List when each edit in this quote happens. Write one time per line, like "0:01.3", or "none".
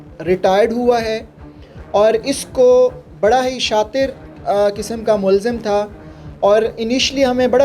none